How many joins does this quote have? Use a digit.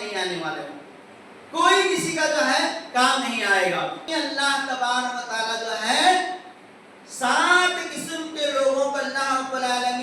1